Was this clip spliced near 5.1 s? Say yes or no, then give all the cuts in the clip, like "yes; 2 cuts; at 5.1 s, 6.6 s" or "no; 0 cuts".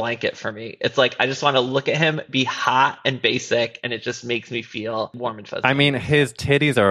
yes; 1 cut; at 5.1 s